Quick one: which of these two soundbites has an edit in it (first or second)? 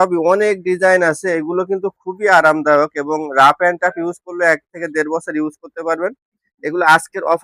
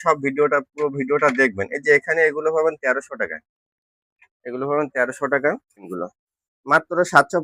second